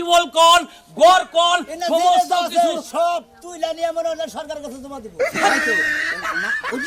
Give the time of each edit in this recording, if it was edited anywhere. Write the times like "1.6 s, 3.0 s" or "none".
none